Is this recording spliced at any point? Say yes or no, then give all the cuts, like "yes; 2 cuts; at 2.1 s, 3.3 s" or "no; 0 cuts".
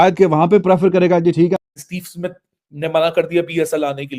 yes; 1 cut; at 1.6 s